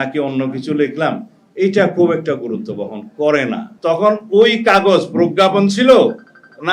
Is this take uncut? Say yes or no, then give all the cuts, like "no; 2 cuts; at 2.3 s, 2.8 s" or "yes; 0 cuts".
no; 1 cut; at 3.7 s